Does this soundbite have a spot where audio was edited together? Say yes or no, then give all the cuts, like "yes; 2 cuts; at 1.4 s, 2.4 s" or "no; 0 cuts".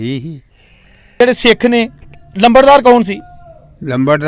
yes; 1 cut; at 1.2 s